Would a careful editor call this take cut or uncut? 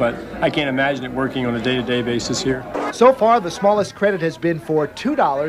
uncut